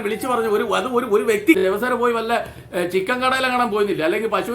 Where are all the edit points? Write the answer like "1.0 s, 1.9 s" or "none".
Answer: 1.6 s